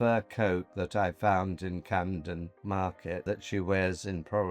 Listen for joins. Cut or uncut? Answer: cut